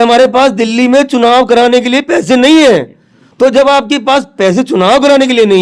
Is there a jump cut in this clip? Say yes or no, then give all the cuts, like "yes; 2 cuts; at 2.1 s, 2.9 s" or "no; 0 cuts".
no; 0 cuts